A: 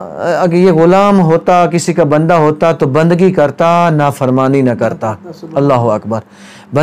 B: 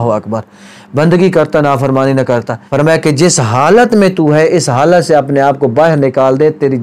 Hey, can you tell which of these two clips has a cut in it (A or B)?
B